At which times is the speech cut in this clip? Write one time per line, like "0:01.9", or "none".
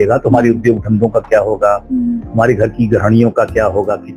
none